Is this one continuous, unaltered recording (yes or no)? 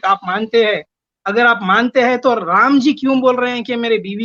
yes